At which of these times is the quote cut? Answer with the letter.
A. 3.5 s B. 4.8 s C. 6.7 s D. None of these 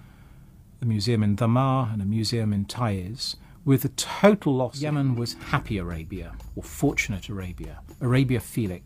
B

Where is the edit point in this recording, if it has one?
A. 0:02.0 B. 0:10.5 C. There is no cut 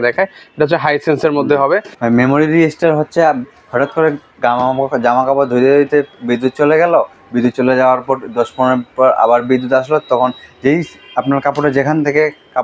A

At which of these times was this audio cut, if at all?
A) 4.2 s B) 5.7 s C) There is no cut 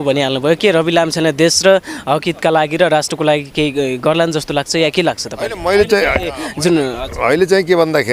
C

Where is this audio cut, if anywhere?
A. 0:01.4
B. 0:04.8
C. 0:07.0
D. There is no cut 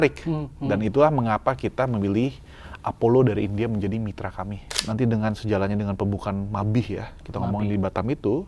B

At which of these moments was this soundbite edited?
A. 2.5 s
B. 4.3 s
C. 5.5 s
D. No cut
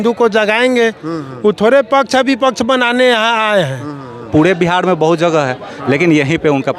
B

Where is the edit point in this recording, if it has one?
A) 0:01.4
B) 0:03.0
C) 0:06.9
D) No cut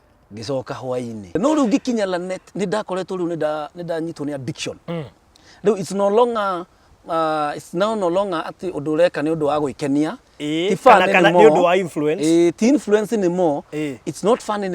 A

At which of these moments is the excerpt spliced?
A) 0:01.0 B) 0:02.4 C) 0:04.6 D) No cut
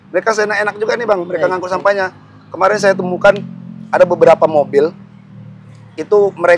D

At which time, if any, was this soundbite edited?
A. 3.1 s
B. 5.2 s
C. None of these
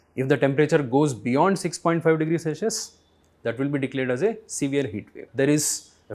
B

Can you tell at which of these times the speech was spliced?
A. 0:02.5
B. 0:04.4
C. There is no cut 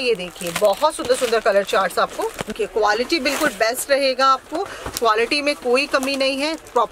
A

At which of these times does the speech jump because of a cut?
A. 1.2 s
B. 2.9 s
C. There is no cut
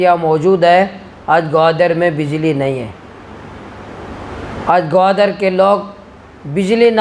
C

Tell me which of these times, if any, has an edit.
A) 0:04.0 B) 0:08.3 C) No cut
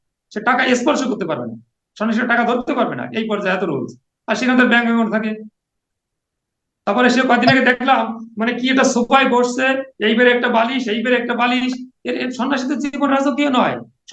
C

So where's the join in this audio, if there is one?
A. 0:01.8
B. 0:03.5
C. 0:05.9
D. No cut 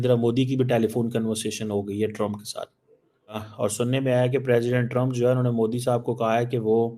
B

